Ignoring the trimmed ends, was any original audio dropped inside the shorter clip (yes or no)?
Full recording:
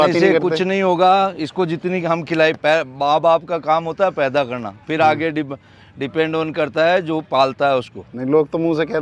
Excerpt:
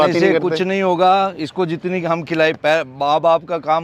no